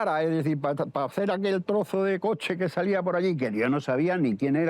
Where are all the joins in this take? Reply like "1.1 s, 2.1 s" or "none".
none